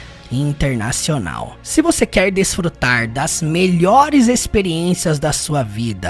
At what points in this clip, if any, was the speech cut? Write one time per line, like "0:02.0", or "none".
none